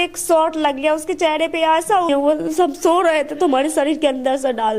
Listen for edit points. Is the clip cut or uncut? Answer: cut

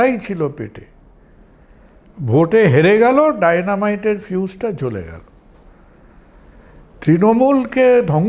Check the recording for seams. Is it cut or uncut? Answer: uncut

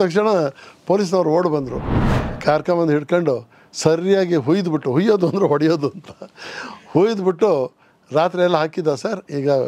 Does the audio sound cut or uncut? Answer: cut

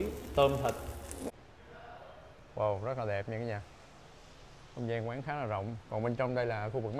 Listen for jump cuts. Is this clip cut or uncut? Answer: cut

